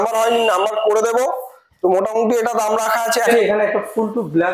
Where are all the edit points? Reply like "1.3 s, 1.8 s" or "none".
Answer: 3.3 s